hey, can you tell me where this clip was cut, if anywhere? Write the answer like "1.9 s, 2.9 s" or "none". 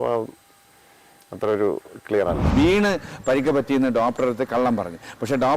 2.5 s